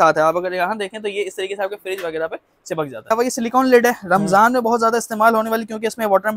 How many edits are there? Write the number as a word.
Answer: one